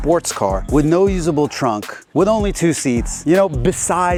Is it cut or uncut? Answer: uncut